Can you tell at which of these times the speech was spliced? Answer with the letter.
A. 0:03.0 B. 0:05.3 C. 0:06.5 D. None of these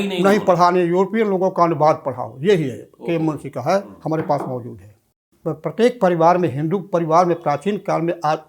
B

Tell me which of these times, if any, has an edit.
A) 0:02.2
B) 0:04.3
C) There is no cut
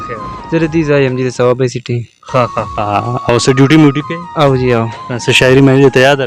C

